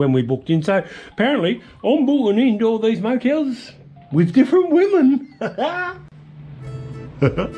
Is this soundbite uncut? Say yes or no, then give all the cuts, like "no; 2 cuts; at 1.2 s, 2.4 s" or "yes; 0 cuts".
yes; 0 cuts